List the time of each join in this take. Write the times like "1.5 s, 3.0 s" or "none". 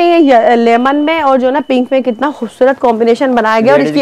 none